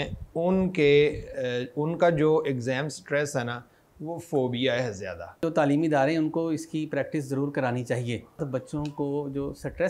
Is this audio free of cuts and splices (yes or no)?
no